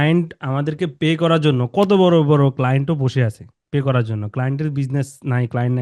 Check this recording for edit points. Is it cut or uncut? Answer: uncut